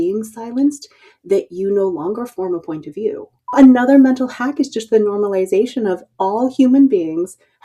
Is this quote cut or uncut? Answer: cut